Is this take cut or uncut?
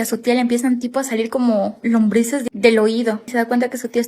cut